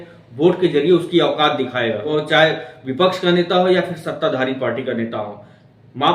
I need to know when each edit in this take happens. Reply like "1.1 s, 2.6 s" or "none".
2.1 s